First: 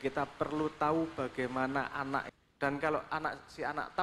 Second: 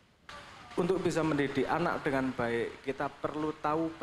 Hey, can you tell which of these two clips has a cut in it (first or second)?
first